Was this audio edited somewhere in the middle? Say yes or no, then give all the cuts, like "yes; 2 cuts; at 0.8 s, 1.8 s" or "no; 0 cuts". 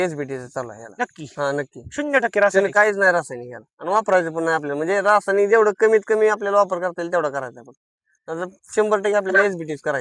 no; 0 cuts